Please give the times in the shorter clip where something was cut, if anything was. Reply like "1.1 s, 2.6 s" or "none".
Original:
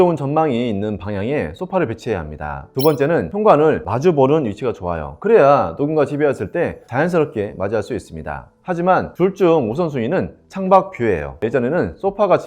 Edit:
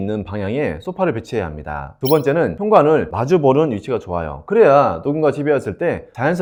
none

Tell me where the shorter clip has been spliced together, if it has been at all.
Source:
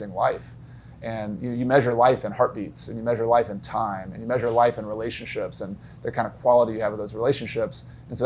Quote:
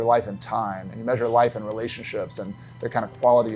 none

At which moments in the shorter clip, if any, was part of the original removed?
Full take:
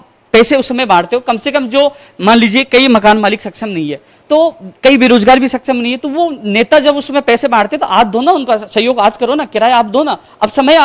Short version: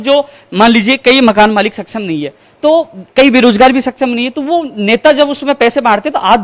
none

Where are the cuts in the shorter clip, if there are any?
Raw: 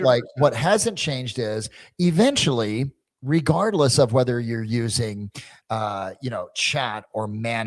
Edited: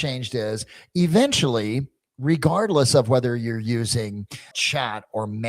4.5 s

